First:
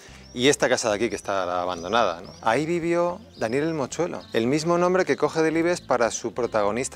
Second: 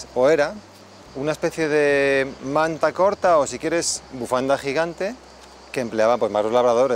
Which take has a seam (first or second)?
first